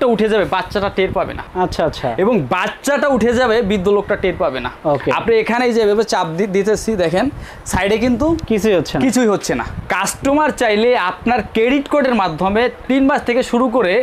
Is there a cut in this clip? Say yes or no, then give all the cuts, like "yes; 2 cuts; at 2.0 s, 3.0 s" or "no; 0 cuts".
yes; 3 cuts; at 1.4 s, 4.7 s, 9.8 s